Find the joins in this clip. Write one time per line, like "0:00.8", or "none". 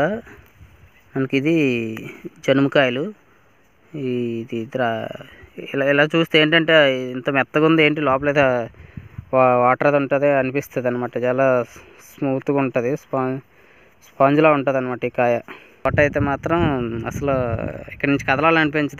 0:15.8